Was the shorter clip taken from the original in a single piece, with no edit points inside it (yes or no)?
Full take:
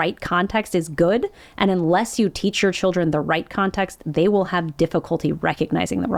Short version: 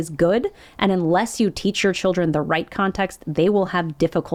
yes